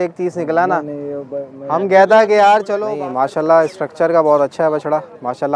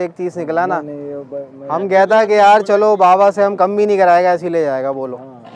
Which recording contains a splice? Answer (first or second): first